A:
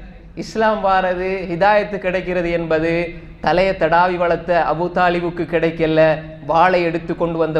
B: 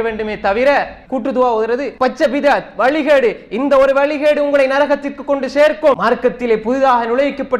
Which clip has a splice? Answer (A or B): B